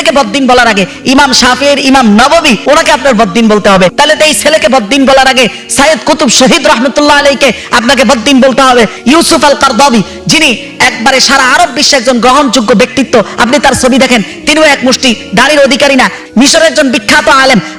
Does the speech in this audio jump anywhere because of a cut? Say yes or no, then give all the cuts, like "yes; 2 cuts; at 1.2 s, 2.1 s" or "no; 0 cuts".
yes; 4 cuts; at 2.6 s, 3.9 s, 9.0 s, 16.2 s